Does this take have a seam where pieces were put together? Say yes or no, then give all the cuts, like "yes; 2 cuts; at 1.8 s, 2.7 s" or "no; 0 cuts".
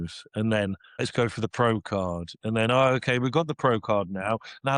yes; 1 cut; at 1.0 s